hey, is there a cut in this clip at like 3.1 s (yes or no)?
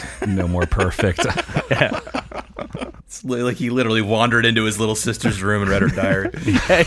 yes